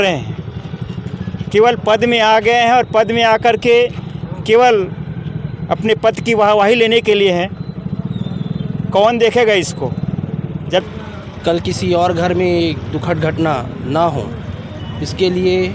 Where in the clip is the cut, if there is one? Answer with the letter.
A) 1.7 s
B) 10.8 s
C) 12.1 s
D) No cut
B